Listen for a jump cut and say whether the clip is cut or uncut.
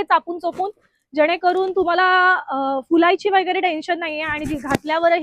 uncut